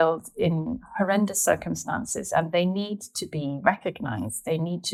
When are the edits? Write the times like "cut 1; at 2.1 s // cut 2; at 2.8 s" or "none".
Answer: none

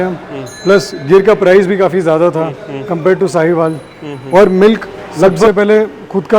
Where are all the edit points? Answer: cut 1; at 5.5 s

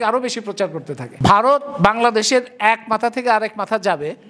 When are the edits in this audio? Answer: cut 1; at 1.0 s

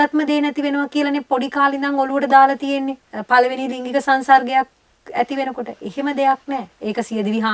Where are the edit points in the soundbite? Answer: cut 1; at 3.1 s

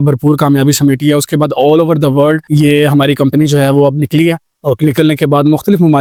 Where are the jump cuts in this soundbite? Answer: none

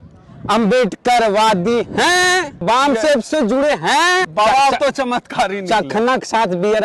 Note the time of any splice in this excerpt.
cut 1; at 2.6 s // cut 2; at 4.3 s

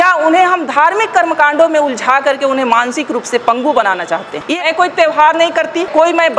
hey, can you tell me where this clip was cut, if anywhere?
cut 1; at 4.5 s

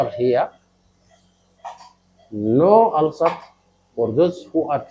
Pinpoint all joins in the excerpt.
none

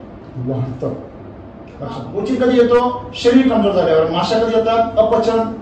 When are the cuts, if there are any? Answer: cut 1; at 2.1 s

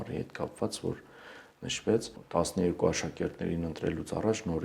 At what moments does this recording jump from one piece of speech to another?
cut 1; at 2.2 s

